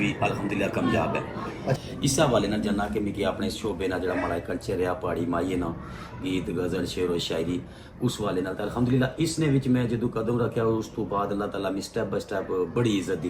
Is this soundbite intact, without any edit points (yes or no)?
no